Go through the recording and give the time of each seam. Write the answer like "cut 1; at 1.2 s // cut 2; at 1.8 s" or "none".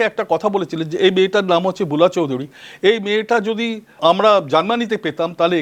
cut 1; at 4.0 s

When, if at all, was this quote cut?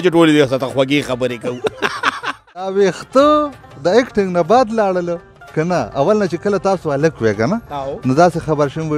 cut 1; at 2.7 s

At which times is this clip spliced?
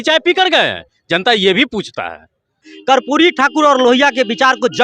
cut 1; at 2.7 s

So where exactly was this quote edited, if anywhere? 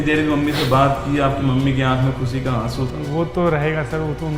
none

